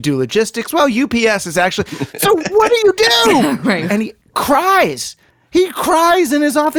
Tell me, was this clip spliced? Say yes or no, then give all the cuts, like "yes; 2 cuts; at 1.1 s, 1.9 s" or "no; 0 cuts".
yes; 1 cut; at 3.9 s